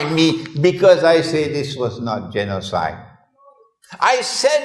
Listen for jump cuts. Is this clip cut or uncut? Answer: uncut